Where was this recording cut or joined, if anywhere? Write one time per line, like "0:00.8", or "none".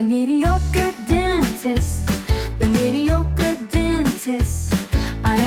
none